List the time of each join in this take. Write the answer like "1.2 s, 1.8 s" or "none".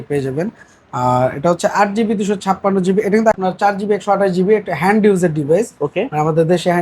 3.3 s

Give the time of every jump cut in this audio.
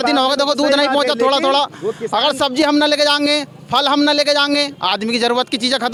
none

